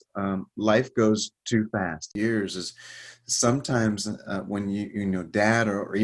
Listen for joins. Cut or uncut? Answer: cut